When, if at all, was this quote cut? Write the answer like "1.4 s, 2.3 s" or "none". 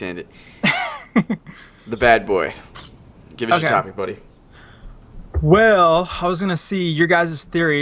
6.1 s